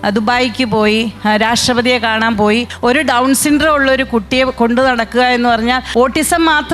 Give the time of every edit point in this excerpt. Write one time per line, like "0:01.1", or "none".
0:02.7
0:05.8

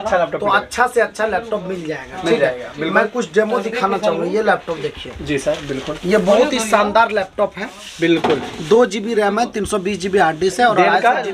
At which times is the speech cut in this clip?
none

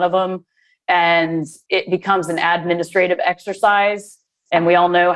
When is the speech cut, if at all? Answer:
0:01.5

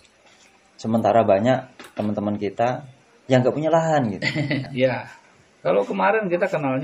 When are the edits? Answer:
0:04.6

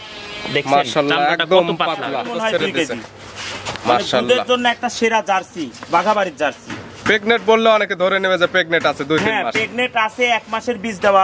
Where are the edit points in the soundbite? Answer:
0:02.2

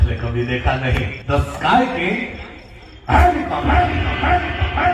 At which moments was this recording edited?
0:01.2

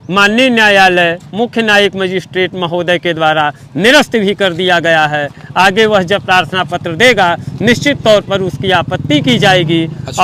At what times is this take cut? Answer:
none

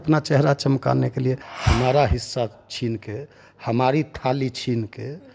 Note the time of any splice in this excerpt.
0:01.5

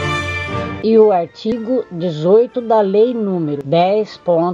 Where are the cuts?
0:00.8
0:02.6
0:03.6

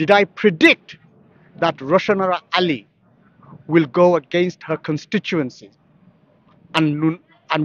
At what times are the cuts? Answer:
none

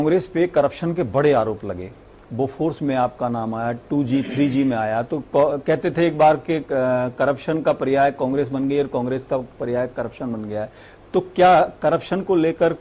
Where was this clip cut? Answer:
none

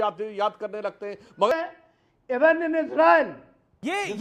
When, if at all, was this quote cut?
0:01.5

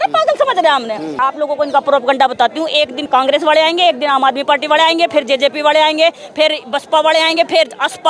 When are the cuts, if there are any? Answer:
0:01.1
0:03.1

